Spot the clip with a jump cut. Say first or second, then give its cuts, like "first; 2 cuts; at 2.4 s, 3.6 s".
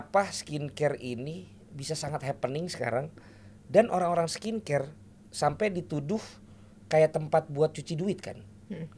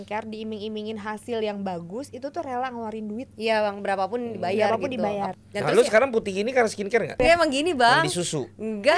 second; 2 cuts; at 5.3 s, 7.2 s